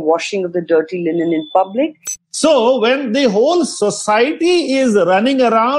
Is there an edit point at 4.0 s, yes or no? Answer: no